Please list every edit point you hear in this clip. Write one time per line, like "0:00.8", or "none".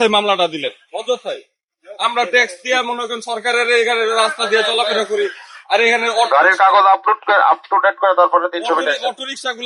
none

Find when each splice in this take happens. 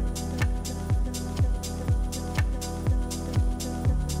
none

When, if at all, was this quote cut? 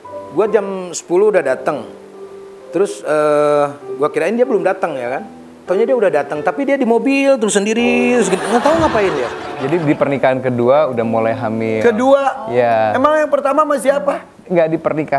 0:09.6

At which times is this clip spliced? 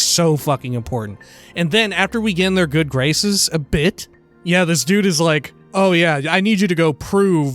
0:05.6

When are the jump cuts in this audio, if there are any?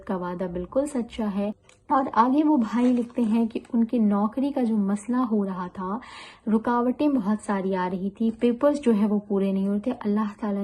0:01.6

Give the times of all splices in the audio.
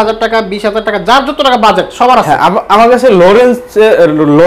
none

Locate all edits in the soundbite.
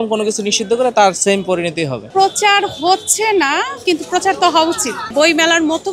0:02.0
0:05.1

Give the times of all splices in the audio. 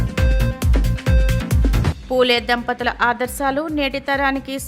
0:01.8

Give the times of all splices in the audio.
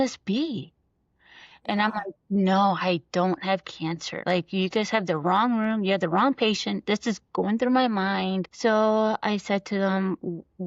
0:08.5

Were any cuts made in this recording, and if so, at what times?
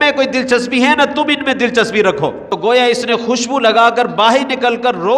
0:02.5

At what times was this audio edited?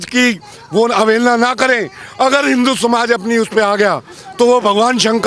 none

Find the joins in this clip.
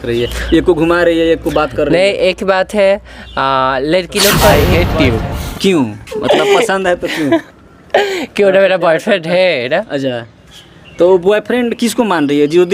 0:04.5

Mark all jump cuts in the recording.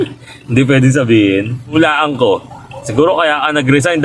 0:01.6

